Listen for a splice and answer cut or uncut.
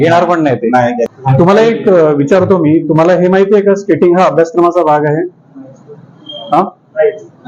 cut